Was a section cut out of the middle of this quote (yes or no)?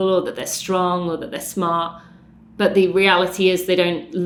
no